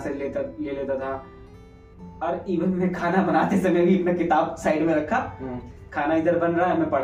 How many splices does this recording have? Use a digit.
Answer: 0